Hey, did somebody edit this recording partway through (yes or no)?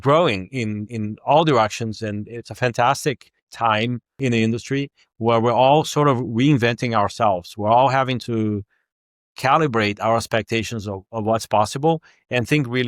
yes